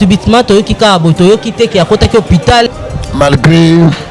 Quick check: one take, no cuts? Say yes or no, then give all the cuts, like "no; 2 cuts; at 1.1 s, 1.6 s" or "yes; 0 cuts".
no; 1 cut; at 2.7 s